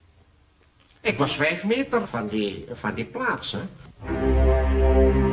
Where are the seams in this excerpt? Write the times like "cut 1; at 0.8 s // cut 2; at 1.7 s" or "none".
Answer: cut 1; at 3.9 s